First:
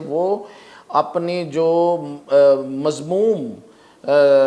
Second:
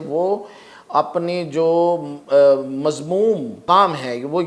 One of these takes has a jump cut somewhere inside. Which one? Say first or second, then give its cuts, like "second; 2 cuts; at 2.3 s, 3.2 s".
second; 1 cut; at 3.6 s